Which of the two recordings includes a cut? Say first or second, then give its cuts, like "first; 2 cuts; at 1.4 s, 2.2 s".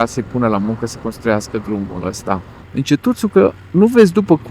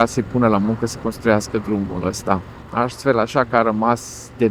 first; 1 cut; at 2.6 s